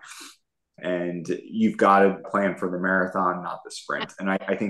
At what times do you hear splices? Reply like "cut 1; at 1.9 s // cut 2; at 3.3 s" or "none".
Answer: cut 1; at 0.8 s // cut 2; at 2.3 s